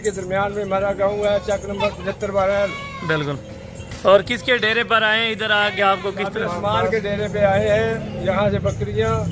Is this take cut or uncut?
uncut